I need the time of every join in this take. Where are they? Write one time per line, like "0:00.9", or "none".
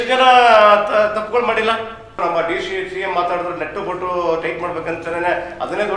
0:02.2